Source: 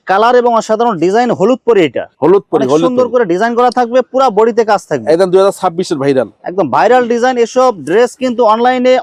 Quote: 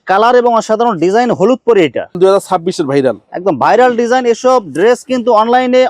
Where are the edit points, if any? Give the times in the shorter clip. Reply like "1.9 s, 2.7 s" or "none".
2.2 s